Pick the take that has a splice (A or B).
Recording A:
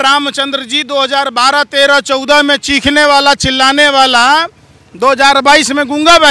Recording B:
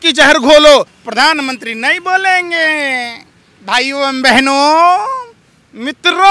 B